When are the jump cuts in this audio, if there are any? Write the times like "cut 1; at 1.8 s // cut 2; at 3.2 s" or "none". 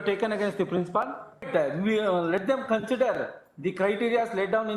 cut 1; at 1.5 s